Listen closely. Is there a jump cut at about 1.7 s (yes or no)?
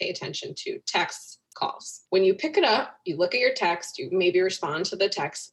yes